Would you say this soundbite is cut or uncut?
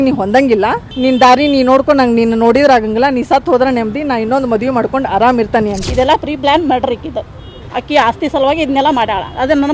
cut